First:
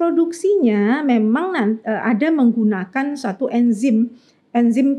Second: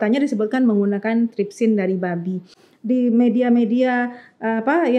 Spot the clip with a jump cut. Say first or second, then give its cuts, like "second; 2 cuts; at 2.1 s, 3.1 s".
second; 1 cut; at 2.6 s